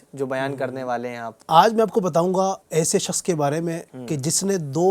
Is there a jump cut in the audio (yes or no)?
yes